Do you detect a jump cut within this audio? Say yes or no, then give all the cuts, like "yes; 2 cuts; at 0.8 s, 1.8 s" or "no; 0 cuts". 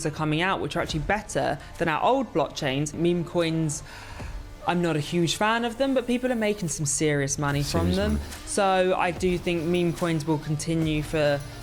yes; 1 cut; at 2.9 s